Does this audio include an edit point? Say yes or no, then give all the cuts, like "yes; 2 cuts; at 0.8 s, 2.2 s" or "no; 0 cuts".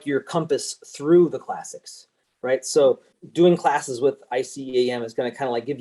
yes; 1 cut; at 3.2 s